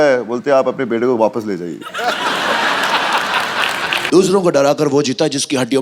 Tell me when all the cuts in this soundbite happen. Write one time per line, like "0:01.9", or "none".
0:03.9